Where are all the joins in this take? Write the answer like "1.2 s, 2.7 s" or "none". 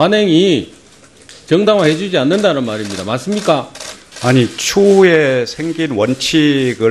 none